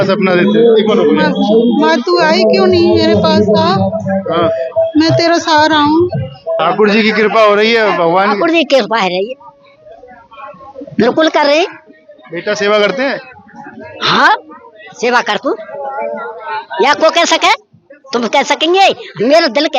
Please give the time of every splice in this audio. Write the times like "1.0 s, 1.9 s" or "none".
6.6 s